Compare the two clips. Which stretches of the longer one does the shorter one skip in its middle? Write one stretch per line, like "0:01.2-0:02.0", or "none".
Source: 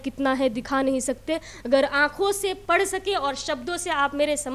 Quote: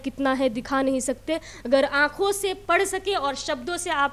none